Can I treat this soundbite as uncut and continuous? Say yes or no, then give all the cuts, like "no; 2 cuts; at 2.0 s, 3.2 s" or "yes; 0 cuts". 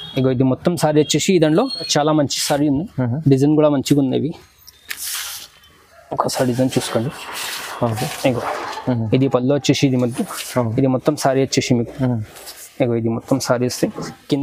no; 1 cut; at 1.9 s